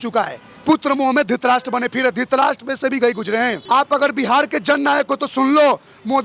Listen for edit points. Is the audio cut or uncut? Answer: cut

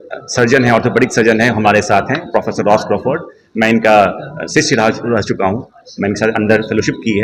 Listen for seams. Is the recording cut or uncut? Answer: uncut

